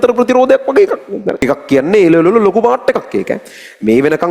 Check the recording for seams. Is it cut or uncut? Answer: cut